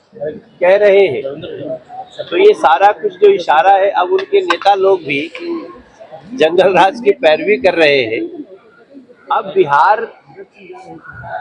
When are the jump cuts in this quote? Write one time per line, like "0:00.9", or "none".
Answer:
none